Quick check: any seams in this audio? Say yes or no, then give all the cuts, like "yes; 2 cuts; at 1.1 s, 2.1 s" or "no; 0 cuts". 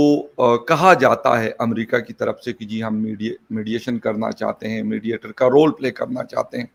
no; 0 cuts